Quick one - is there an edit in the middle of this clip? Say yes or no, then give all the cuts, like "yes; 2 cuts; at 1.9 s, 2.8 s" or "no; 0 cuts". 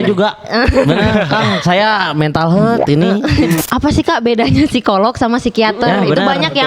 yes; 1 cut; at 3.6 s